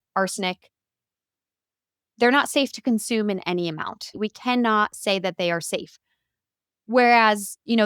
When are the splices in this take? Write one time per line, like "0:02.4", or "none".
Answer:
0:04.2